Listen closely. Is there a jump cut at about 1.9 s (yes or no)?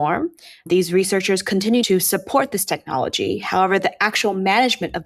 yes